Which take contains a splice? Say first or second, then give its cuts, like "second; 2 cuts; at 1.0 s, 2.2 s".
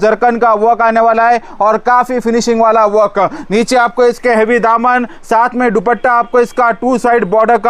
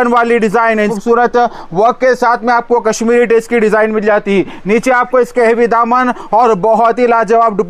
second; 1 cut; at 0.9 s